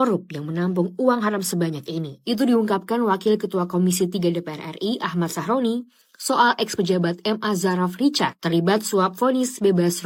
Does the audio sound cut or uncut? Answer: uncut